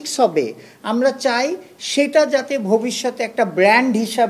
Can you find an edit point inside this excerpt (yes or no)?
no